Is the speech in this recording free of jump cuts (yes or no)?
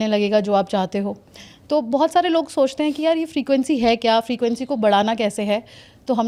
yes